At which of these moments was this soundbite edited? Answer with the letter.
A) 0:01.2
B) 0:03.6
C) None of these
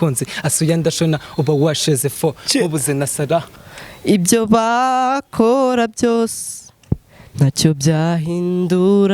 B